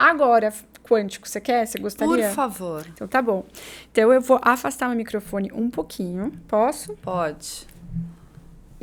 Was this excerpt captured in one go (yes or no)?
yes